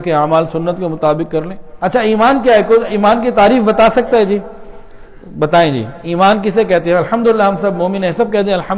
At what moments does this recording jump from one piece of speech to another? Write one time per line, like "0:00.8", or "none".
0:01.6